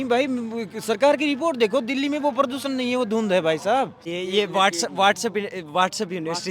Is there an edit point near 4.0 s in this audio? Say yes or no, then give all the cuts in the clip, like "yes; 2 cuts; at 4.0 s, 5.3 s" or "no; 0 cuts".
yes; 1 cut; at 4.0 s